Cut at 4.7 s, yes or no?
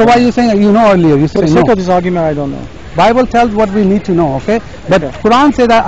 no